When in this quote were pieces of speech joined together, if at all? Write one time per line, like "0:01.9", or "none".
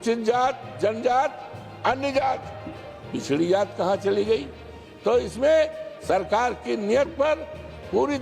none